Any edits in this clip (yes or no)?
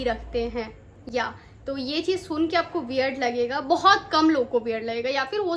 no